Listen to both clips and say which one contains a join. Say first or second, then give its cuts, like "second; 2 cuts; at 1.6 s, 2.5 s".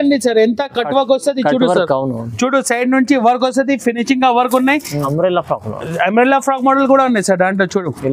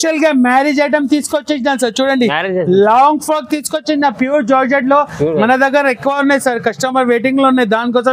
first; 1 cut; at 5.0 s